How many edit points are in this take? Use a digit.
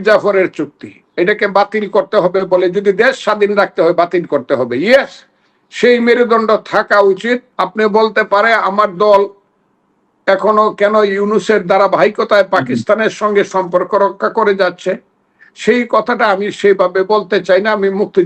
2